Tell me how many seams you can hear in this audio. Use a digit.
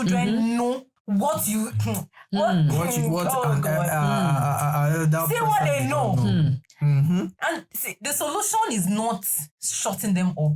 1